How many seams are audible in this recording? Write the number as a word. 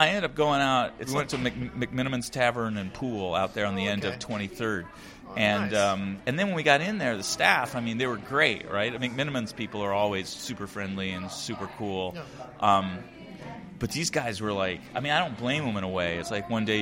two